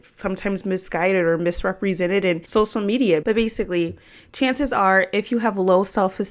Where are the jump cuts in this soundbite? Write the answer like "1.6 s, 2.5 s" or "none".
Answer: 3.2 s

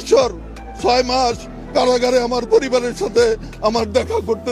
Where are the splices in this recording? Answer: none

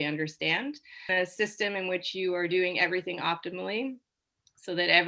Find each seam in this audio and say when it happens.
1.1 s

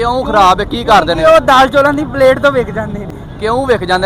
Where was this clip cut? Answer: none

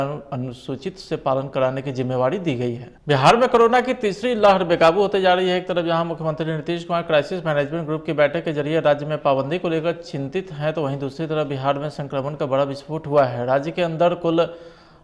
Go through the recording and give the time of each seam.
3.0 s

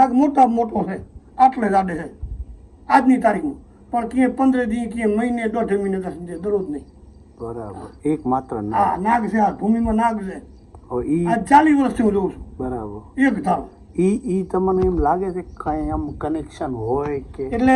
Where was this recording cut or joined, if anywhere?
none

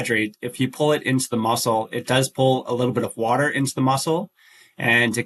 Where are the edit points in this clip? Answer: none

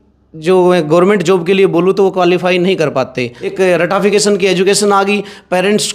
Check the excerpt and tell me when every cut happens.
3.4 s

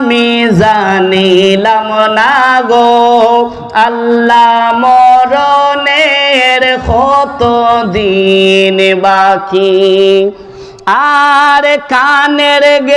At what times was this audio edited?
none

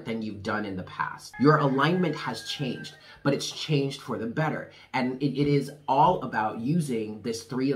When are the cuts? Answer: 1.2 s

